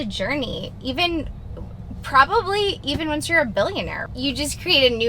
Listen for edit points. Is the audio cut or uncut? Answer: cut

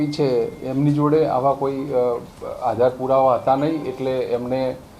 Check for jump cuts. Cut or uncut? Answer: uncut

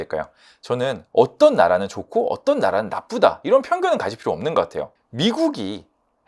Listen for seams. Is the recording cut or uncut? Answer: cut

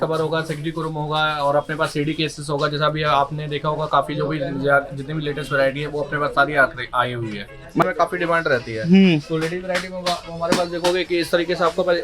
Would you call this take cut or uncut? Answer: cut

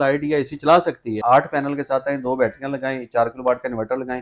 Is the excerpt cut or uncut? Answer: cut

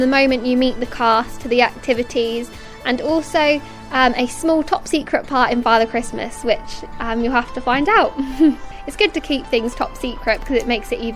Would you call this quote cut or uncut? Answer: cut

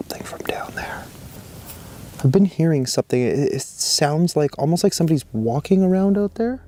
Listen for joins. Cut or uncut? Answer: uncut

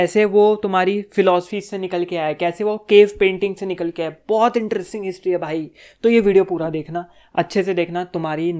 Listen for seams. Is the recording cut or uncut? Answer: uncut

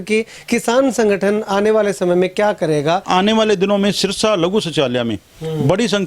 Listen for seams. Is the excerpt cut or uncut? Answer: cut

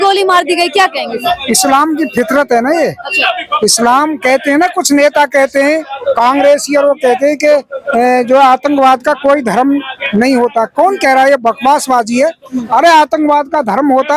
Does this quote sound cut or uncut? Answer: uncut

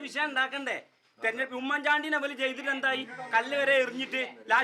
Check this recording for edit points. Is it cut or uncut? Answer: uncut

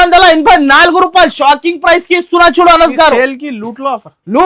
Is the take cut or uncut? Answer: uncut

